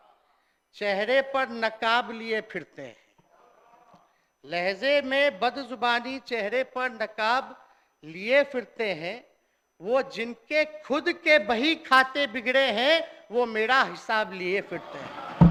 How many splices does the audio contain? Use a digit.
0